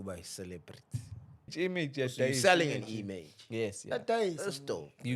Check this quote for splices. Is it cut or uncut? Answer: cut